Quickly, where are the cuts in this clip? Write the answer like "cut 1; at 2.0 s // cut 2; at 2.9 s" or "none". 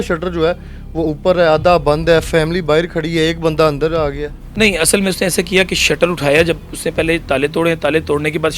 none